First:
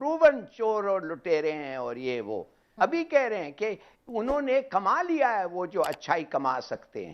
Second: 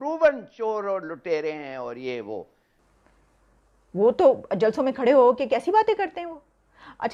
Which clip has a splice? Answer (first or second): second